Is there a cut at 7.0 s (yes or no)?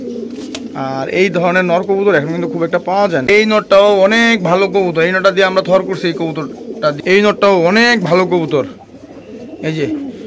yes